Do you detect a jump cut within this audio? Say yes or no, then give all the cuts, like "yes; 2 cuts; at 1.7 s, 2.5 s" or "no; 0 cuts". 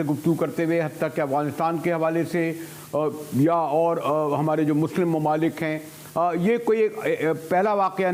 no; 0 cuts